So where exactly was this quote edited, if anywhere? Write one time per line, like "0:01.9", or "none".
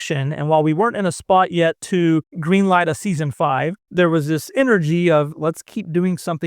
0:02.3
0:03.8
0:05.3

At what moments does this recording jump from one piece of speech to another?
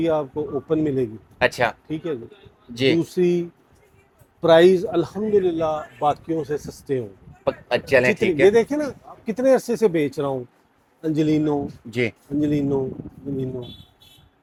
none

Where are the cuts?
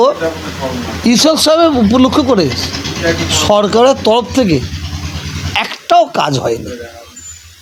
none

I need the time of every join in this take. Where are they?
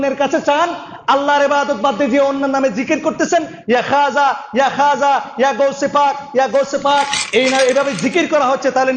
0:07.4

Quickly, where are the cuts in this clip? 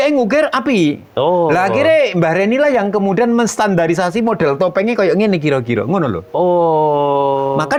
none

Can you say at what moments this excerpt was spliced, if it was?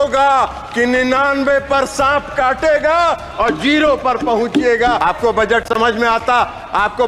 0:05.0

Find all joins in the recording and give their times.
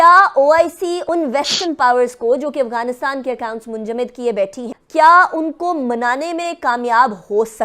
0:01.0

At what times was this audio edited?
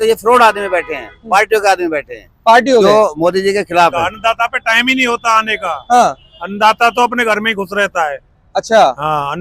0:04.0

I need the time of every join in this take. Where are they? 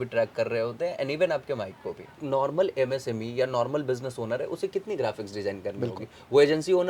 0:02.2

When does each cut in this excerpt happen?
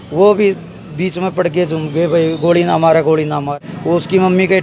0:03.6

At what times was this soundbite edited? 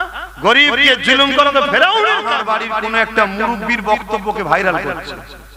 0:02.4

